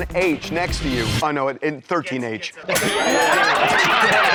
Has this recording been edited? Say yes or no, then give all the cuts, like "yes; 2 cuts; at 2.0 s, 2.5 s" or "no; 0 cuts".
no; 0 cuts